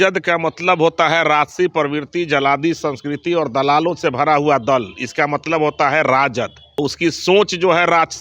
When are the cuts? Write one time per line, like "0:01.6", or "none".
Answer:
0:06.6